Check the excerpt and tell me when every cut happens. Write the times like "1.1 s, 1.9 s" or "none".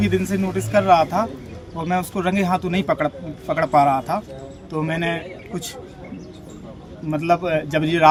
none